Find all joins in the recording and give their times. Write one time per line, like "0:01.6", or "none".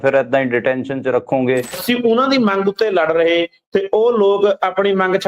0:01.8